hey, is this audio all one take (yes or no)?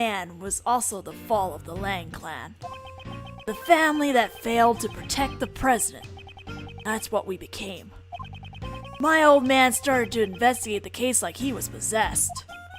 no